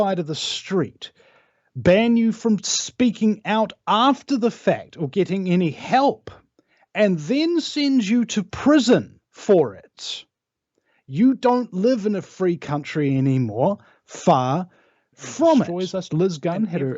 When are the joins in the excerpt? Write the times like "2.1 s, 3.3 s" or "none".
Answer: 15.8 s